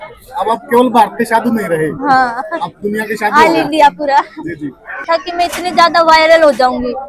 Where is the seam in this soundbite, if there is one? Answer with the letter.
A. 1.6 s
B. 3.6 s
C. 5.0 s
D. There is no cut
C